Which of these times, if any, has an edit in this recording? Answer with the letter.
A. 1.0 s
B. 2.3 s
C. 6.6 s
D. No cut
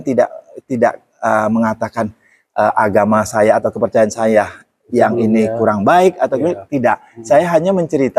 D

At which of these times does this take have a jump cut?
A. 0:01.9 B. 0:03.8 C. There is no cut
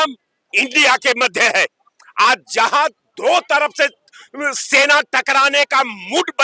C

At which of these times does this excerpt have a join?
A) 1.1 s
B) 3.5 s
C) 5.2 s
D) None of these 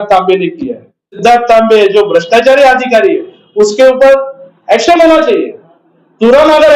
A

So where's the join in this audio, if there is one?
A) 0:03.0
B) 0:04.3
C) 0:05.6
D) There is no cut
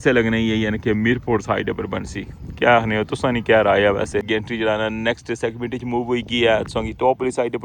B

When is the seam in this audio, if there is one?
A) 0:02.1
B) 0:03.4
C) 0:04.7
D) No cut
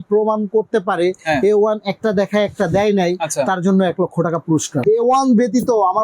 C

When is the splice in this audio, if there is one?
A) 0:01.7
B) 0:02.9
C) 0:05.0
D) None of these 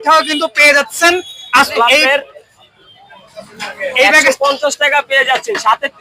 D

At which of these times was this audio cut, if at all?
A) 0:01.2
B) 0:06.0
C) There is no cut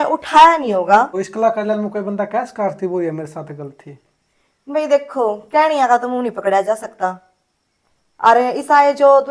A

